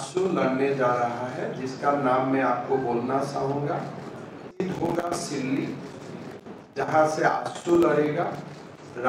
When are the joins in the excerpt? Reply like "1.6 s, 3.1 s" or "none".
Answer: 4.4 s